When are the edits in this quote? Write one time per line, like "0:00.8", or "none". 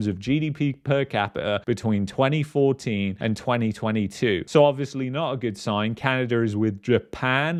none